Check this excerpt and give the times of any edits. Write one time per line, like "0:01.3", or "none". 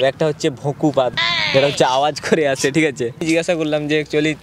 0:03.2

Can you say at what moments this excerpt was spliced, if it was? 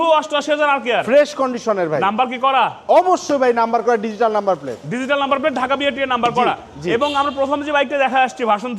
none

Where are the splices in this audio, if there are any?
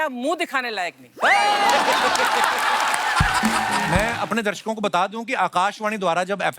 0:03.9

